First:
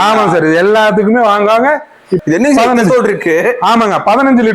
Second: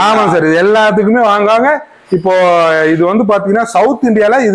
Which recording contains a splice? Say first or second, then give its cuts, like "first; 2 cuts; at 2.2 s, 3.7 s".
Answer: first; 1 cut; at 2.2 s